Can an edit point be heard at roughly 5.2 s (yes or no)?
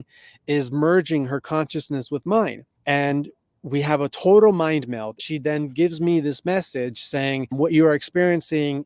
yes